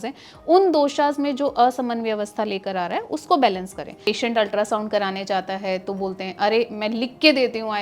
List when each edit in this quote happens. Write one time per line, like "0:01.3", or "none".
0:04.1